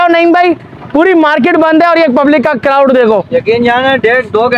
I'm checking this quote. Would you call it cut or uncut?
uncut